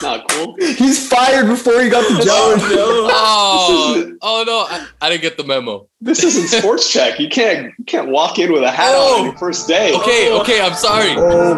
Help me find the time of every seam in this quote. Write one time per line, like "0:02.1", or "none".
none